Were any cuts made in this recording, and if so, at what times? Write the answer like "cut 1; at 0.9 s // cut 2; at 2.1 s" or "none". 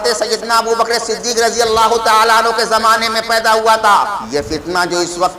cut 1; at 4.1 s